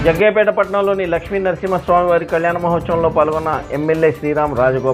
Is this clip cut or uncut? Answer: uncut